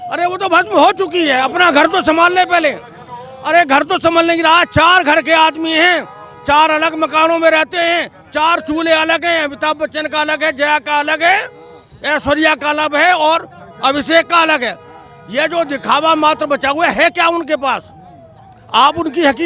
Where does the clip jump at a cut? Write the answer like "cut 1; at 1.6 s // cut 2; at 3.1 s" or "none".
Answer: none